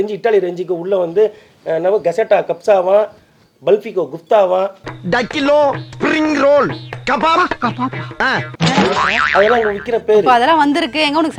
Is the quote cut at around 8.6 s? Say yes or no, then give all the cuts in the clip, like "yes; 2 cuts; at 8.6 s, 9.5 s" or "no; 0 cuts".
no; 0 cuts